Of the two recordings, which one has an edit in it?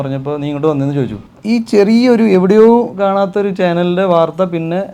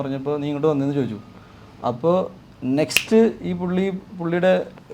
first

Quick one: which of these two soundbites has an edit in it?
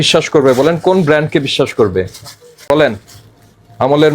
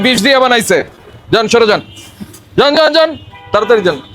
first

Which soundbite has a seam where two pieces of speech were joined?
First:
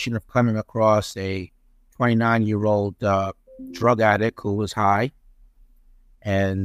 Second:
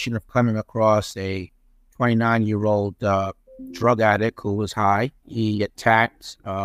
second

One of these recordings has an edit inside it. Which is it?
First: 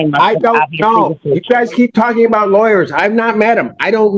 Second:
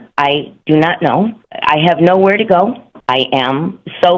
second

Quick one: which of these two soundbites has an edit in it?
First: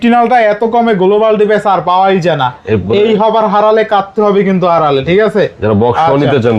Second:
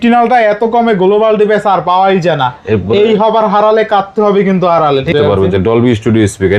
second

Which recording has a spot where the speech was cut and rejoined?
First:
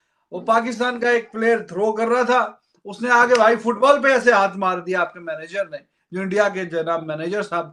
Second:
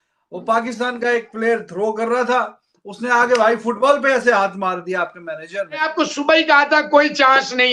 second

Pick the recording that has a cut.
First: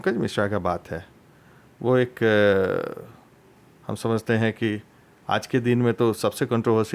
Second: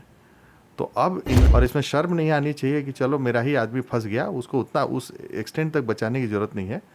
second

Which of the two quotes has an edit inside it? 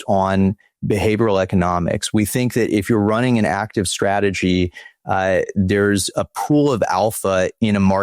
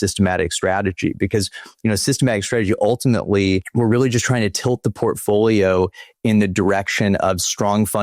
second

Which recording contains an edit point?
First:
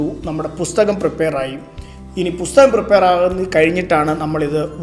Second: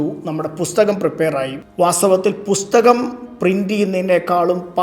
second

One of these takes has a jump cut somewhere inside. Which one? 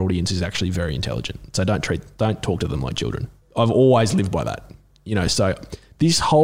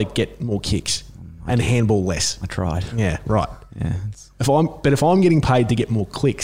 first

